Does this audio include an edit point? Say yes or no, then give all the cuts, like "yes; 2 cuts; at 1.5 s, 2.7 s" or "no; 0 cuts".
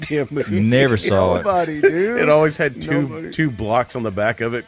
no; 0 cuts